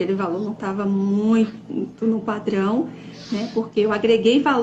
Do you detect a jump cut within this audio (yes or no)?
no